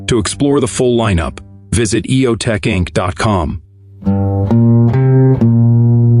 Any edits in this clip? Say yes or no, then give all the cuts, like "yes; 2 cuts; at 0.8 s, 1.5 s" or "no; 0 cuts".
no; 0 cuts